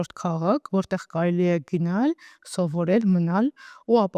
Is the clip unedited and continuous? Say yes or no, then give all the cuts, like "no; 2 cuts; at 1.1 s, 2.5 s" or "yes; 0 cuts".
yes; 0 cuts